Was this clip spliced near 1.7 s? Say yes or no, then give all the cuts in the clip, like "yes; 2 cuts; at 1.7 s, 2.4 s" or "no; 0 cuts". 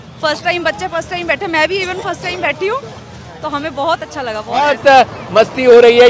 no; 1 cut; at 4.6 s